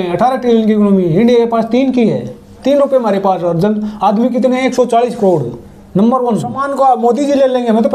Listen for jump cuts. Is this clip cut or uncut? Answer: cut